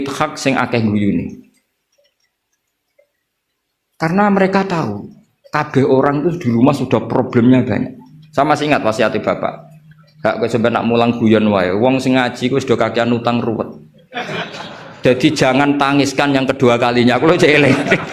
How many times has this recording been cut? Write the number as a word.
zero